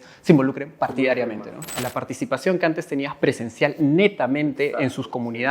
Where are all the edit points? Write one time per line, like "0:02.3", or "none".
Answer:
0:01.8

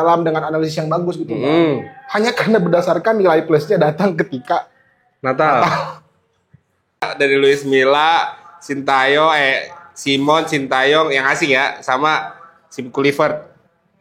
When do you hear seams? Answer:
0:07.1

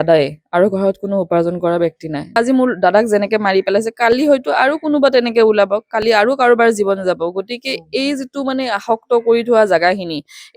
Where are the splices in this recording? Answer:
0:02.3

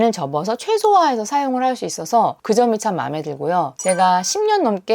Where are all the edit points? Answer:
0:03.7

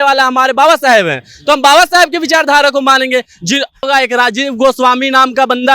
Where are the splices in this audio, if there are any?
0:03.9

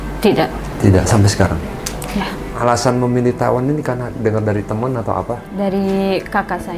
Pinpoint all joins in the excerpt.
0:02.4

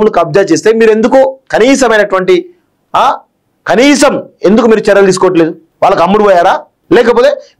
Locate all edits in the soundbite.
0:05.6
0:06.7

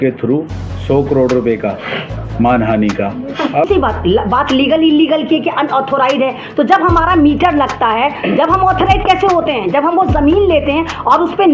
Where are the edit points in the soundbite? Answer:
0:03.7

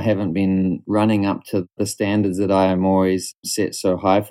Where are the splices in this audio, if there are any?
0:00.8
0:01.7
0:03.3

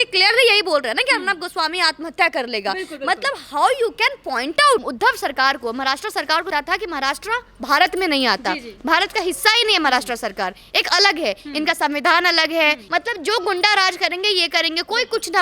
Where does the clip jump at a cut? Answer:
0:04.8
0:06.5
0:12.8

